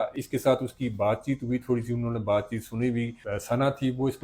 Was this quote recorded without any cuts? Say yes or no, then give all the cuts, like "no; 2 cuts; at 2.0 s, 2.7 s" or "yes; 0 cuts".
yes; 0 cuts